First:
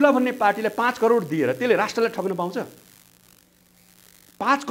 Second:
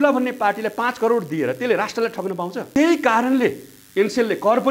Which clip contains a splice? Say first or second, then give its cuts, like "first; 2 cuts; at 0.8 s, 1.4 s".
second; 1 cut; at 2.6 s